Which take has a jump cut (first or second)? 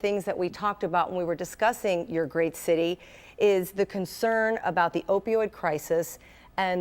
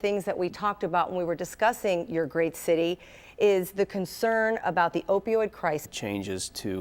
first